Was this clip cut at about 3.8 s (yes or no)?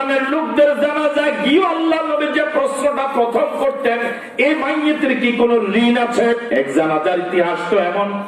no